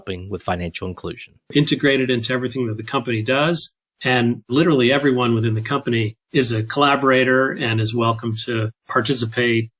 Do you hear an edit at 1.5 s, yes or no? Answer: yes